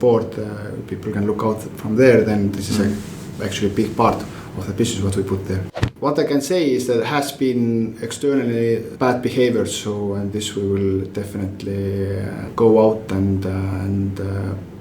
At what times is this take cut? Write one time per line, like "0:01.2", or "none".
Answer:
0:05.7
0:08.9
0:12.5